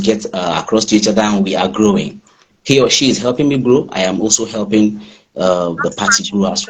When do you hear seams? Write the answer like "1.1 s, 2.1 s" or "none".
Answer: 2.5 s